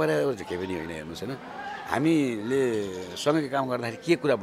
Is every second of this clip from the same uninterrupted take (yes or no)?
yes